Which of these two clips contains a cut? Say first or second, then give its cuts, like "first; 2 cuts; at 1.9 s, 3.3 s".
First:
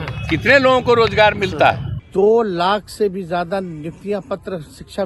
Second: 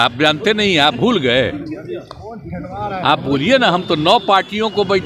first; 1 cut; at 1.9 s